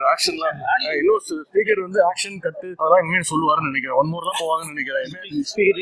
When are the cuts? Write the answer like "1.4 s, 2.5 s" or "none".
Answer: 2.6 s